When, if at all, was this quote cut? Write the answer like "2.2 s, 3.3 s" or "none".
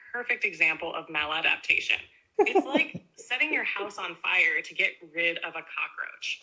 2.1 s